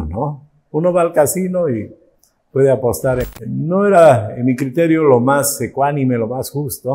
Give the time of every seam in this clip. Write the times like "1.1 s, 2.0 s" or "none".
3.3 s